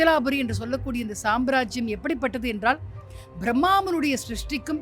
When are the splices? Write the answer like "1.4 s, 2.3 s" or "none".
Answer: none